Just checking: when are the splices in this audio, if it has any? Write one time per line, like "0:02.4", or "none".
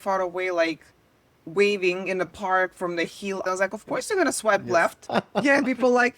0:03.4
0:05.1